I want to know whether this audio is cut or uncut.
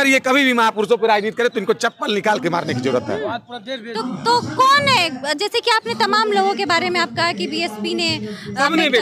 uncut